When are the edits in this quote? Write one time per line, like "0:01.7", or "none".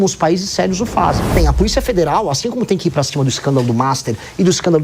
0:01.4